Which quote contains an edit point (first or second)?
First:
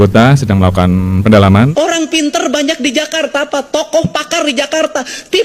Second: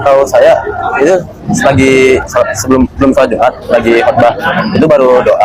first